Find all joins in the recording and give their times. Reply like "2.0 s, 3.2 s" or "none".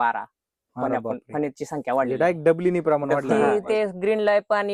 3.3 s